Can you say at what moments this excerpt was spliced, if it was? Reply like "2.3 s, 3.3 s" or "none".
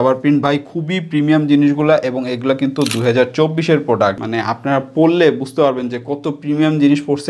4.1 s